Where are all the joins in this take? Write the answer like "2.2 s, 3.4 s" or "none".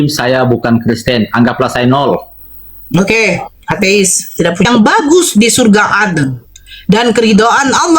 4.7 s